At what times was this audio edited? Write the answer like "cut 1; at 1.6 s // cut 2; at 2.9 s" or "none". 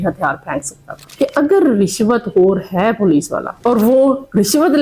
cut 1; at 1.1 s